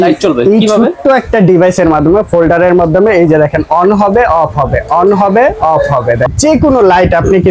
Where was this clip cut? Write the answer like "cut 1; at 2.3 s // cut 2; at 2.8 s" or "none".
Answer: cut 1; at 6.3 s